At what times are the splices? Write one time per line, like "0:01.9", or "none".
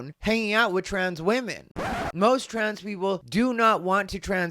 0:01.8